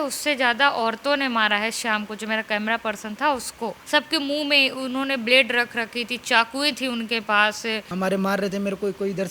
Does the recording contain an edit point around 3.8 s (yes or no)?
yes